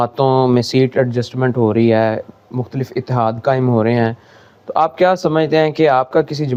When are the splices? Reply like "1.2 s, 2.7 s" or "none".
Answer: none